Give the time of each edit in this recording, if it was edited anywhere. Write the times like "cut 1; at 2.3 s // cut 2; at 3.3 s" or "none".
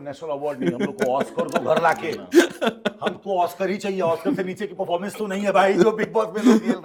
none